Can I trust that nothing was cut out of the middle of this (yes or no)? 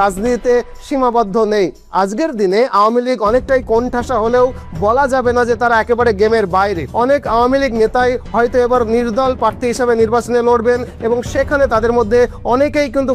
yes